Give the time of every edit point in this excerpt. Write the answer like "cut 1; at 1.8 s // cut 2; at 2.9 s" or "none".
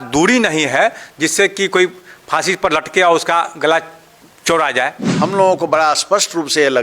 cut 1; at 5.0 s